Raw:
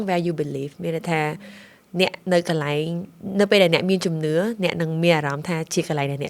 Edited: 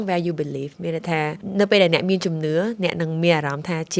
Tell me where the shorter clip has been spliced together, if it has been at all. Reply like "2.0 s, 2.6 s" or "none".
1.4 s